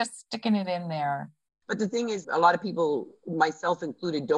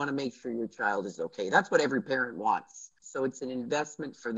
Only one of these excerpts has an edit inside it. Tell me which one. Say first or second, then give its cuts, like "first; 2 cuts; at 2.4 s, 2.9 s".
first; 1 cut; at 1.7 s